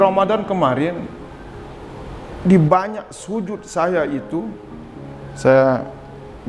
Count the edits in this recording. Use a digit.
0